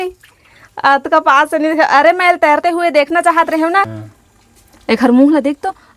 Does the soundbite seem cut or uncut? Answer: cut